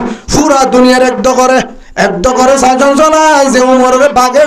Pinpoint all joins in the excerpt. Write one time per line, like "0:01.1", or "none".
0:01.8